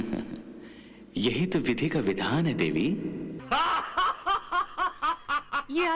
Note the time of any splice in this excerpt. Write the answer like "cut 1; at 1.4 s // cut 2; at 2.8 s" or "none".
cut 1; at 3.4 s

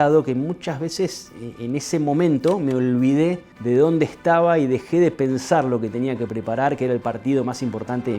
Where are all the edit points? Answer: cut 1; at 3.5 s

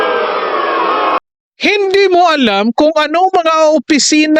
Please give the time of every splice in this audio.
none

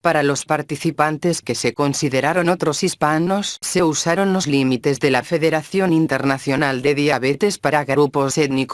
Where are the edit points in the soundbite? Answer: none

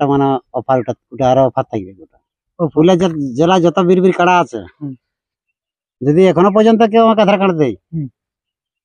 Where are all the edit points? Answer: cut 1; at 2.6 s

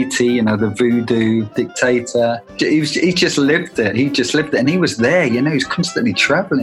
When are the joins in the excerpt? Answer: cut 1; at 1.5 s // cut 2; at 2.5 s

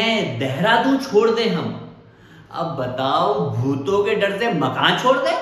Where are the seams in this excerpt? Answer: none

